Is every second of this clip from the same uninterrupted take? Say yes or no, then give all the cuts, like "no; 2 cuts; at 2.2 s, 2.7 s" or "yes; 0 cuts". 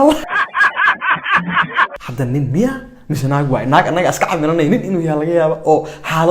no; 1 cut; at 1.9 s